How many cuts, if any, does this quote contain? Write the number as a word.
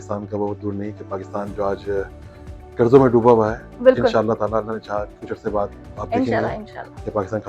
zero